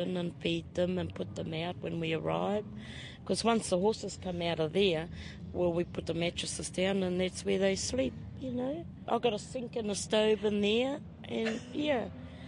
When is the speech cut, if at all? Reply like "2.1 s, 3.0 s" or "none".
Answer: 9.0 s